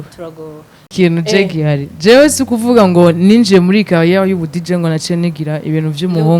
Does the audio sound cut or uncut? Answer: cut